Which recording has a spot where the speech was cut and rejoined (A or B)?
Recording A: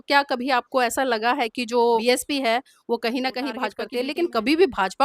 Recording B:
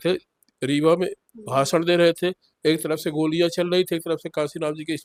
A